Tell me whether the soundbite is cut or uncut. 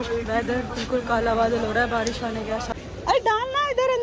cut